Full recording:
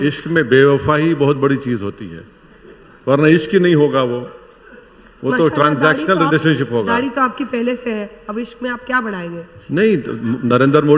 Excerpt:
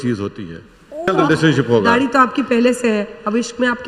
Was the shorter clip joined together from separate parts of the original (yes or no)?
yes